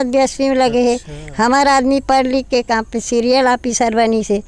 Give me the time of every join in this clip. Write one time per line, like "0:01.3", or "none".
none